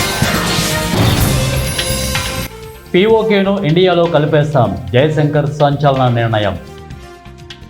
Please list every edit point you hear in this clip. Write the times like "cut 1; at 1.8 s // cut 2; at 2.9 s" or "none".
cut 1; at 1.7 s